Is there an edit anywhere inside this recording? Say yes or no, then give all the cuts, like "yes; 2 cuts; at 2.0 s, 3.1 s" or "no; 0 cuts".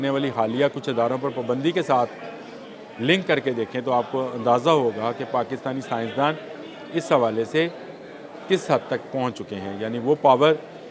no; 0 cuts